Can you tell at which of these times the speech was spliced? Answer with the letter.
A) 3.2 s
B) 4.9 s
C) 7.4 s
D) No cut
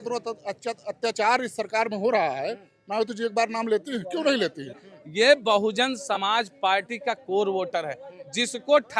B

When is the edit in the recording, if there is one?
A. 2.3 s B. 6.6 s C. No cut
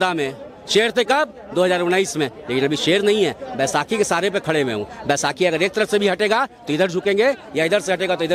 C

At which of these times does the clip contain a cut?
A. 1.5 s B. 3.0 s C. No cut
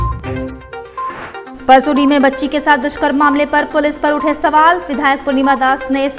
A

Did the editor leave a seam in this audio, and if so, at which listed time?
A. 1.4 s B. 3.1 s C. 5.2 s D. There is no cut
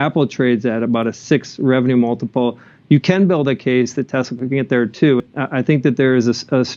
C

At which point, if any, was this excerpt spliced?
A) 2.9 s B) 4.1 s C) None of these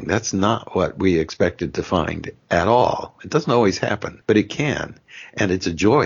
B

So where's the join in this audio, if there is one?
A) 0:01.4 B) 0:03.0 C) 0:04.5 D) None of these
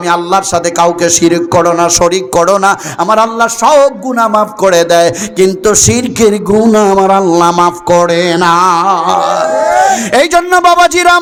D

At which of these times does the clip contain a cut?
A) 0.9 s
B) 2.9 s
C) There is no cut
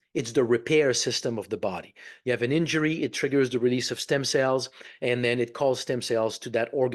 C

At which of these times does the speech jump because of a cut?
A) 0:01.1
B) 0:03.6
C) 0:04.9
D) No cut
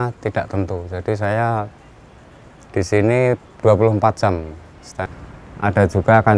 C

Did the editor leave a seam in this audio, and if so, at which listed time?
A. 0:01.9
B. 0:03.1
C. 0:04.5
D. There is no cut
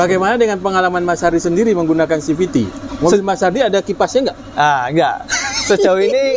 D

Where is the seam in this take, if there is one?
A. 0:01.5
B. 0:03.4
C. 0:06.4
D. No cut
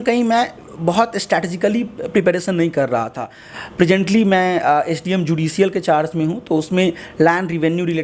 B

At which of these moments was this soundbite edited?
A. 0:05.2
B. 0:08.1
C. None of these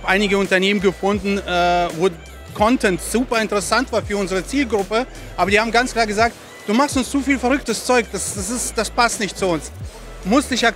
C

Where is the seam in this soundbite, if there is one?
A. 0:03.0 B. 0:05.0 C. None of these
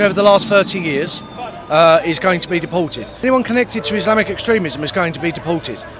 A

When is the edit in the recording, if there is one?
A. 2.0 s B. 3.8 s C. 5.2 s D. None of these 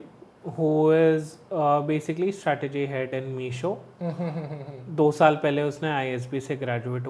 D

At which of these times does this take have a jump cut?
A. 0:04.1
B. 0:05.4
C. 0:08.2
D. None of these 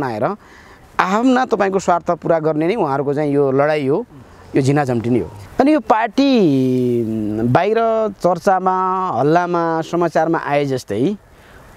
B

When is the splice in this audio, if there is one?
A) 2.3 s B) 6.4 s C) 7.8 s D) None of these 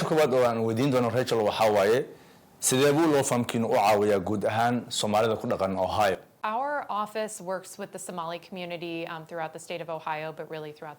B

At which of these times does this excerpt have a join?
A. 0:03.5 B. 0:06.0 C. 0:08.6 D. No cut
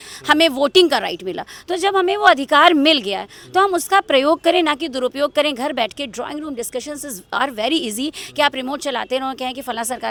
D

